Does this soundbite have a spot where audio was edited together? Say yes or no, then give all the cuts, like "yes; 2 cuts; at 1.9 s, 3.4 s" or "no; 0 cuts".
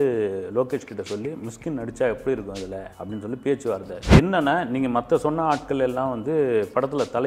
yes; 1 cut; at 4.2 s